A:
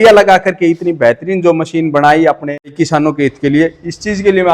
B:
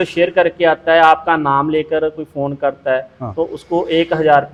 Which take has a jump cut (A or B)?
A